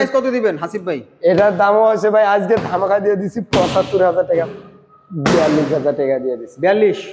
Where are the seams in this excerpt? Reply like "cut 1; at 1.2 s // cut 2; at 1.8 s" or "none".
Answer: cut 1; at 4.3 s

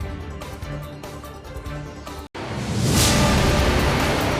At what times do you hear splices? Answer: cut 1; at 2.3 s

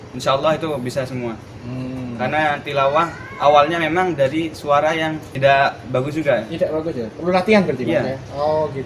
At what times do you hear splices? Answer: cut 1; at 5.2 s

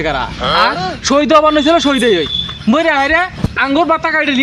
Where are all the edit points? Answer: none

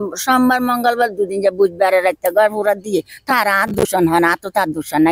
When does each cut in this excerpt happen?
none

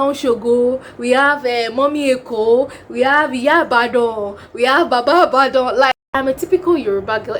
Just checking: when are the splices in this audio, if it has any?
cut 1; at 6.3 s

